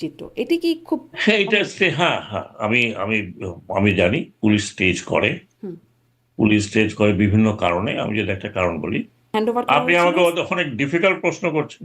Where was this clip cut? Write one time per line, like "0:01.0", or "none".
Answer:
0:09.3